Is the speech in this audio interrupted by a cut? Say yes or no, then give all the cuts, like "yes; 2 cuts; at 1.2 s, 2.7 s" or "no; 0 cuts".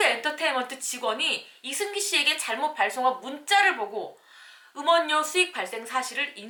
no; 0 cuts